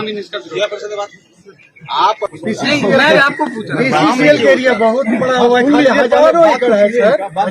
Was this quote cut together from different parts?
yes; 1 cut; at 2.3 s

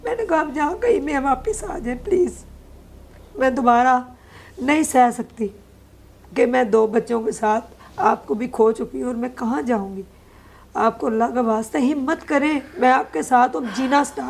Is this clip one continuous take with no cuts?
yes; 0 cuts

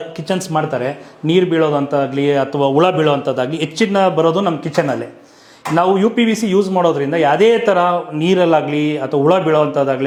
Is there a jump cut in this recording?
no; 0 cuts

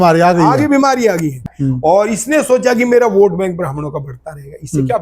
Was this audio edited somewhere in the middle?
yes; 1 cut; at 1.5 s

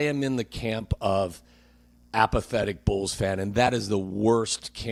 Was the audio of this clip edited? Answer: no; 0 cuts

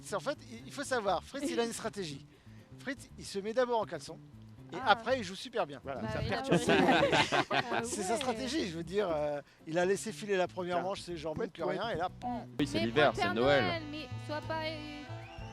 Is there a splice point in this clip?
yes; 1 cut; at 12.6 s

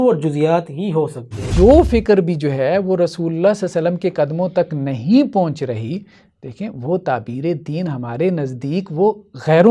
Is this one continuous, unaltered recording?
no; 1 cut; at 1.5 s

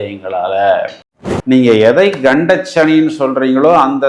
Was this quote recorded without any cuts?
no; 1 cut; at 0.9 s

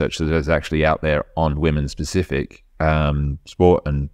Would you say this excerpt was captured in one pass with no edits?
yes; 0 cuts

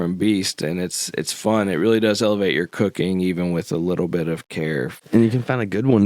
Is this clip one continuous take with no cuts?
no; 1 cut; at 5.0 s

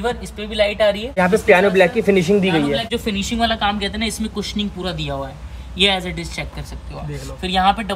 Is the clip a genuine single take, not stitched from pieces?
no; 2 cuts; at 1.2 s, 2.9 s

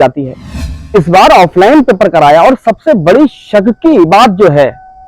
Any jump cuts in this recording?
yes; 1 cut; at 0.9 s

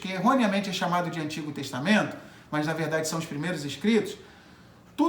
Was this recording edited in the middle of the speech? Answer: no; 0 cuts

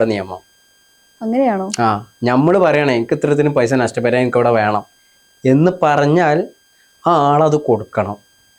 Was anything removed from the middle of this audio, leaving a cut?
no; 0 cuts

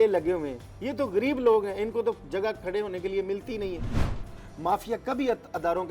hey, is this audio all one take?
no; 1 cut; at 4.1 s

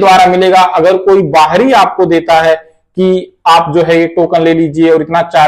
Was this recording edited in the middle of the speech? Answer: no; 0 cuts

